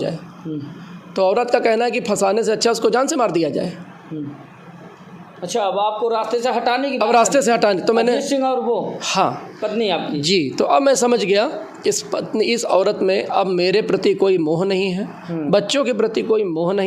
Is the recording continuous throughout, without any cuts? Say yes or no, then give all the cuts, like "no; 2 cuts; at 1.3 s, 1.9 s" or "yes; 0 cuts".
yes; 0 cuts